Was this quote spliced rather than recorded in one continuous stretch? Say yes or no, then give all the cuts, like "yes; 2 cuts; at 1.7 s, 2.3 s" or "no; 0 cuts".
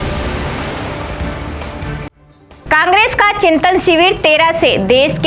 yes; 1 cut; at 2.2 s